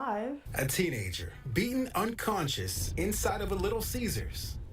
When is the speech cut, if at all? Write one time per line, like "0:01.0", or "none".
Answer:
0:01.7